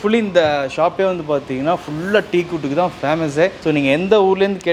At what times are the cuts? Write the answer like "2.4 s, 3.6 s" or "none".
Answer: none